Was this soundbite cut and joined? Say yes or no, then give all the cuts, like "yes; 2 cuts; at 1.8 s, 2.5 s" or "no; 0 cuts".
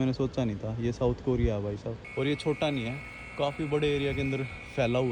yes; 1 cut; at 2.0 s